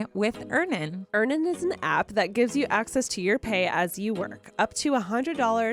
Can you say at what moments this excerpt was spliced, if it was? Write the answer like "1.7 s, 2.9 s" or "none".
none